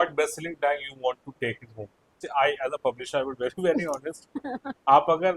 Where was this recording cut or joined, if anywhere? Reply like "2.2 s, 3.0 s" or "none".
2.2 s

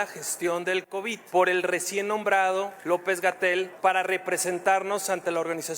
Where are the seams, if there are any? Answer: 1.2 s, 2.8 s, 3.7 s

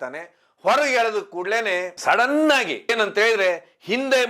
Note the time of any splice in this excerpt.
2.9 s

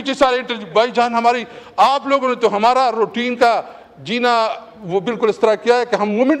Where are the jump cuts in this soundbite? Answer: none

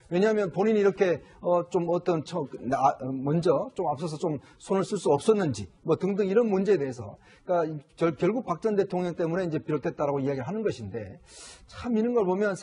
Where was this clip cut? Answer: 11.0 s

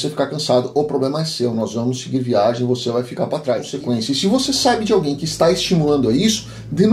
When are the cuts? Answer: 3.7 s

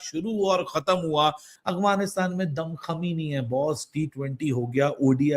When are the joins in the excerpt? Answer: 1.5 s

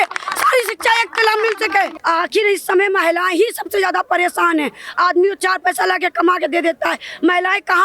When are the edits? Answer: 2.0 s

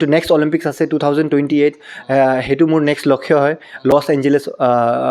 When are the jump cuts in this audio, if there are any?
none

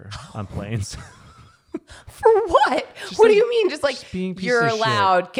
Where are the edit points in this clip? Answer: none

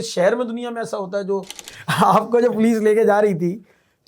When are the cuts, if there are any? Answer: 1.7 s

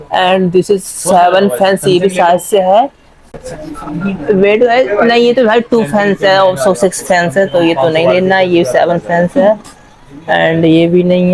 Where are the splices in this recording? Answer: none

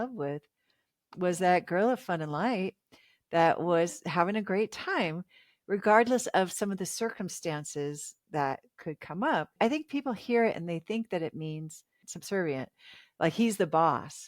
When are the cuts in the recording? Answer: 9.5 s, 12.1 s

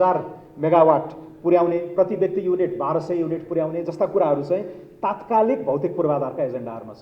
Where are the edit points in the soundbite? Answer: none

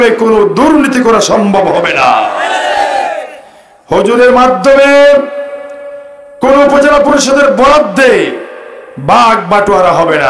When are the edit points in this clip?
none

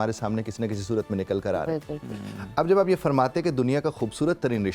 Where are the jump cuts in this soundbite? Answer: none

